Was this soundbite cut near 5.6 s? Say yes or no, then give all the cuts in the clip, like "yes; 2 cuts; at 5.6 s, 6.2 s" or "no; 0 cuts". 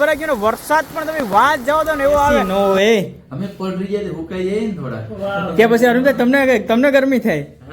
no; 1 cut; at 2.5 s